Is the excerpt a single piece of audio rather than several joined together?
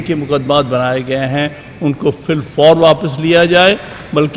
yes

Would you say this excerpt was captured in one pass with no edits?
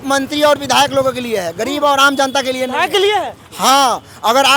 yes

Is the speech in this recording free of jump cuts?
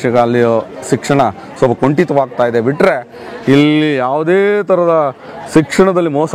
yes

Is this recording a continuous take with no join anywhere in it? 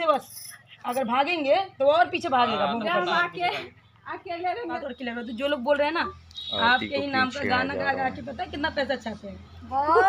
no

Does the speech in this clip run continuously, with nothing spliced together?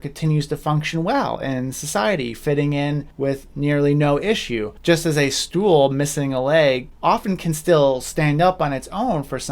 yes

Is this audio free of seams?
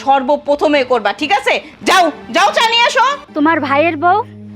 no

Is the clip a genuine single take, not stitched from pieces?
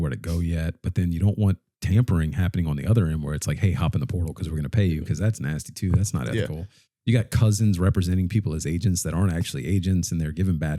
yes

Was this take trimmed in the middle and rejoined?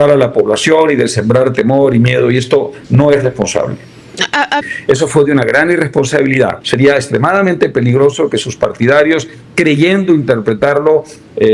yes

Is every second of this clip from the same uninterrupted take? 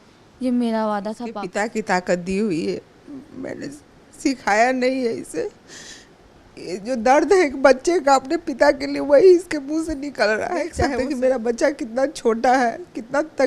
no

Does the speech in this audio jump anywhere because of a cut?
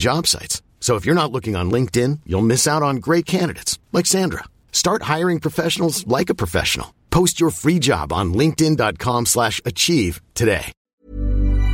yes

